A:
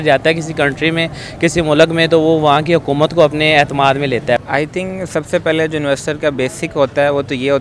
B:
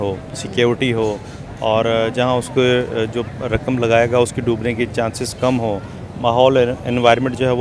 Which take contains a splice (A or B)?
A